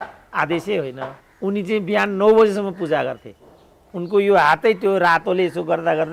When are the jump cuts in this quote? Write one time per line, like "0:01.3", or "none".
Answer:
0:01.2